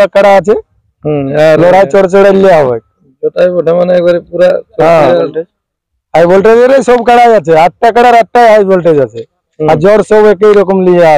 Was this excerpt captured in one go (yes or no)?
yes